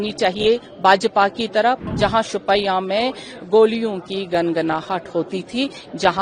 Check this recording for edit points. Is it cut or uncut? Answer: cut